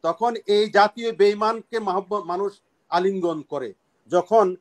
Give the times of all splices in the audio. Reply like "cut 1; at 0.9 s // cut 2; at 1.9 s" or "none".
none